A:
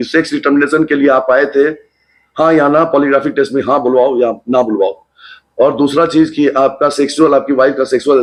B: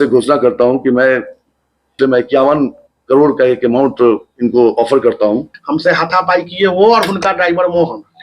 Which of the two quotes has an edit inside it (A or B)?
B